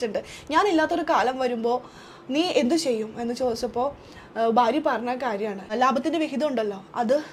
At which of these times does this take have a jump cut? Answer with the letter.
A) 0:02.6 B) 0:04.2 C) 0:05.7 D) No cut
D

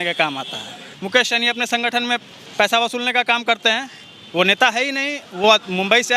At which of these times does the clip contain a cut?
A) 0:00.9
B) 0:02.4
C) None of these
A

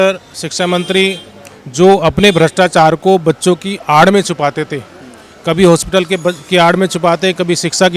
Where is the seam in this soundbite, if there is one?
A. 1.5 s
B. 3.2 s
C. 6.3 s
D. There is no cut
D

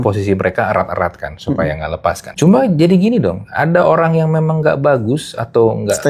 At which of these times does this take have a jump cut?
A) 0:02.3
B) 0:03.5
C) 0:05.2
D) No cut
A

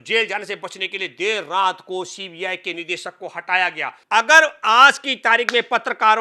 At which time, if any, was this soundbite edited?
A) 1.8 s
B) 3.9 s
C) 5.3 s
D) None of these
B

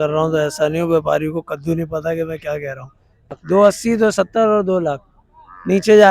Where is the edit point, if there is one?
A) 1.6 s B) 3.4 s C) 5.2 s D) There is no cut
B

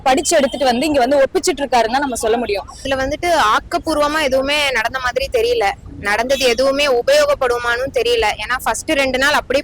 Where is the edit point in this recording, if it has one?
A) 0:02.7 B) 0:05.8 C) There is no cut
A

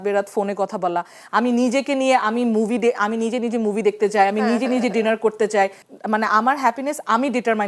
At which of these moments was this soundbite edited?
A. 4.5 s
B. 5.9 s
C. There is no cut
B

